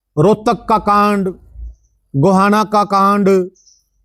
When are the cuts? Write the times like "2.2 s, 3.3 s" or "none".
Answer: none